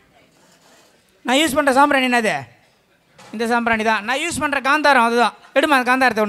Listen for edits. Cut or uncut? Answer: uncut